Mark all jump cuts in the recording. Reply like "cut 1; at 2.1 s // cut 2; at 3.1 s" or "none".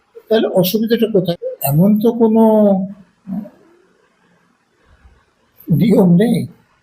cut 1; at 1.2 s